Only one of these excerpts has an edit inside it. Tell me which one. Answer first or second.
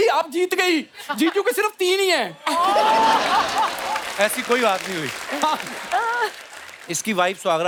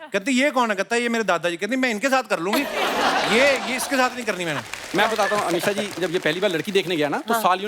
second